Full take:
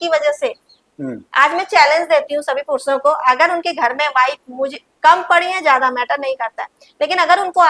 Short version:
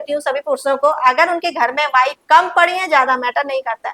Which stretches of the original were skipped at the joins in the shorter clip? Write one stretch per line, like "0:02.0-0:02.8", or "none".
0:04.4-0:04.9